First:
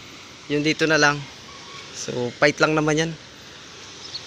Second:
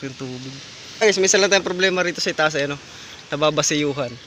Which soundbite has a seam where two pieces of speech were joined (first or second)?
second